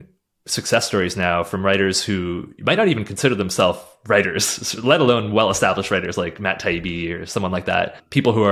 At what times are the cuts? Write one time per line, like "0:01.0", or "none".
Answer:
none